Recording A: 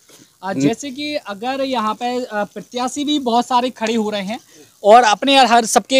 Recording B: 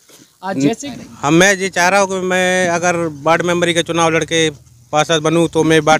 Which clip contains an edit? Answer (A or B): B